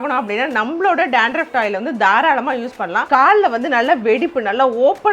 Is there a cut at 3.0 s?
yes; 1 cut; at 3.0 s

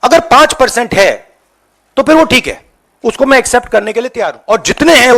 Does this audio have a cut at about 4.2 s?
yes; 1 cut; at 4.2 s

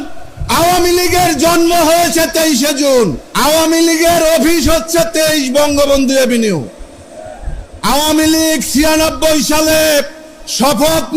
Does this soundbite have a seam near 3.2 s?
yes; 1 cut; at 3.2 s

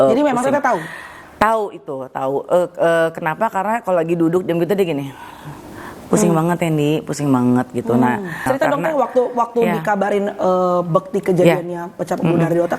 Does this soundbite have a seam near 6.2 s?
no; 1 cut; at 8.4 s

